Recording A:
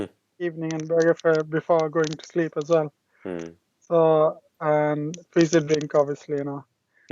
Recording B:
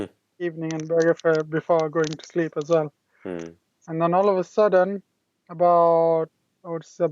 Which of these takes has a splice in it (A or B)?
B